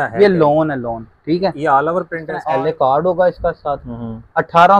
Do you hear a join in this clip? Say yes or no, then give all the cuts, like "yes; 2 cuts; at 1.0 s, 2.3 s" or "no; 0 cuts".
yes; 1 cut; at 2.2 s